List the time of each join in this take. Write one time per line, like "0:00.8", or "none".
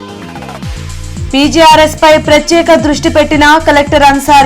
none